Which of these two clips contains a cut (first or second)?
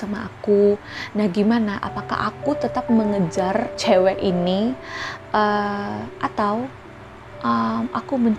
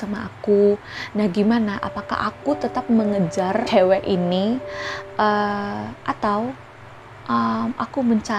second